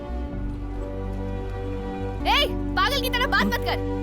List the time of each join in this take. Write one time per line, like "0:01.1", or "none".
0:02.2